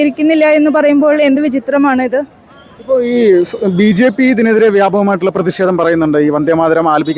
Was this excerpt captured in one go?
yes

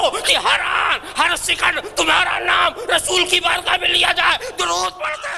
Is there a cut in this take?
no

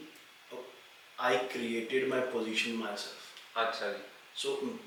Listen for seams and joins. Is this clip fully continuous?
yes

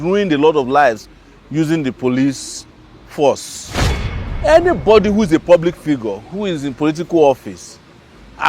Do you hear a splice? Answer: yes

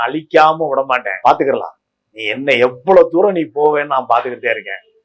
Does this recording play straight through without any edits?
no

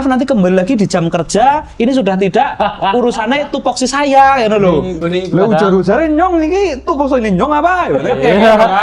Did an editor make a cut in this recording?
yes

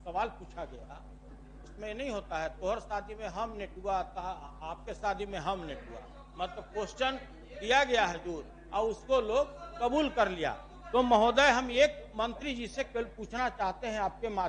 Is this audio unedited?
yes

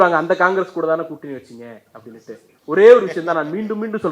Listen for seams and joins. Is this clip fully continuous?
yes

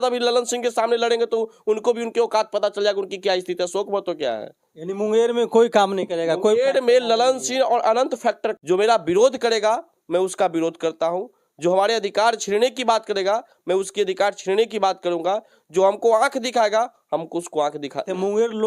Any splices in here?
yes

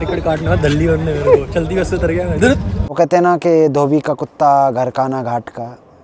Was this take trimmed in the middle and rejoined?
yes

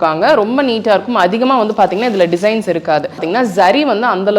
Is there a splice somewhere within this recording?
yes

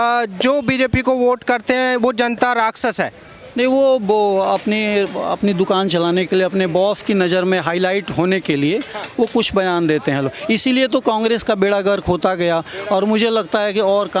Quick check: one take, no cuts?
yes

